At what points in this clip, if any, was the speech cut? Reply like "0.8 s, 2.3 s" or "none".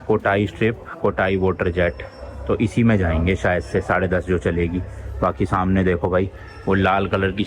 none